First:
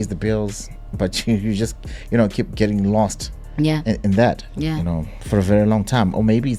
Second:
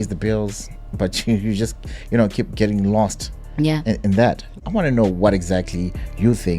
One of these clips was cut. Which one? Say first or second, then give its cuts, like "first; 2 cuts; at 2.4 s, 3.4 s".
second; 1 cut; at 4.6 s